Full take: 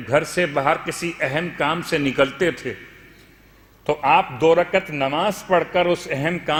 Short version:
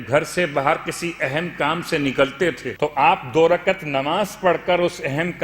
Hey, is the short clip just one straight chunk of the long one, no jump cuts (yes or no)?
no